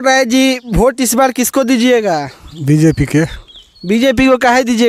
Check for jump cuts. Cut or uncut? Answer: uncut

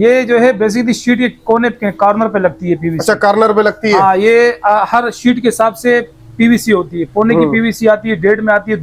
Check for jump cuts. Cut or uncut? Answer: uncut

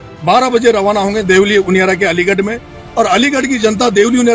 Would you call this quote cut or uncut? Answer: uncut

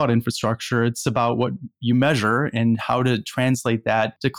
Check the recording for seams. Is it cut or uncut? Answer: uncut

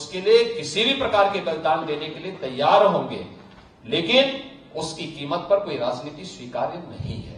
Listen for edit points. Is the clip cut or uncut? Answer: uncut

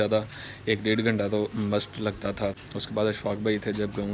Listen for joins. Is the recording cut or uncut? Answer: cut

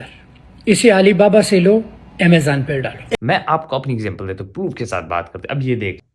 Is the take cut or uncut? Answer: cut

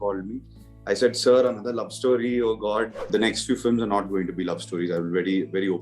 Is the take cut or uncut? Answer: cut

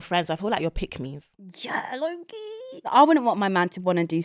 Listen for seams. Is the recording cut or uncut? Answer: cut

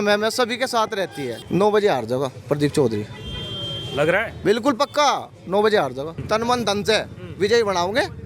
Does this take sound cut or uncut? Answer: cut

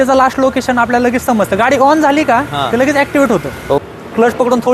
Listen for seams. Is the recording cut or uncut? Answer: cut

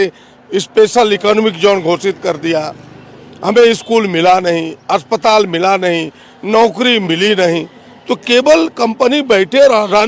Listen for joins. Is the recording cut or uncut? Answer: uncut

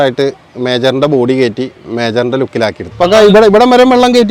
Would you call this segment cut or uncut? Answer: cut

